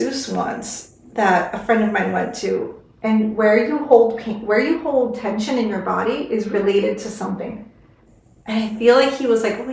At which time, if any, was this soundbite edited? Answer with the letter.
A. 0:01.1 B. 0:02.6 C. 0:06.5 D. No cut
D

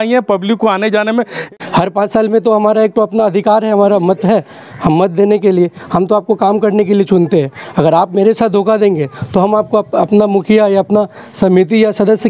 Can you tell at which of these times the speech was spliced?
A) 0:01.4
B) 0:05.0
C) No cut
A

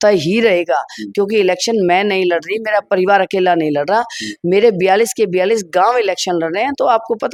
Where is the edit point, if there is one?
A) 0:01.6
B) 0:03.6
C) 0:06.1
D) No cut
D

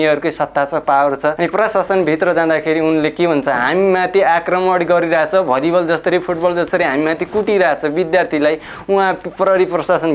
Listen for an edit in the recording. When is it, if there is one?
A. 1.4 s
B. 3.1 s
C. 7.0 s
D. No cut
A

